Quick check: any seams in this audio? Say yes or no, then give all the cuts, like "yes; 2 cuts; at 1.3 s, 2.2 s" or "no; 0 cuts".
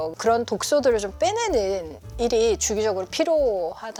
no; 0 cuts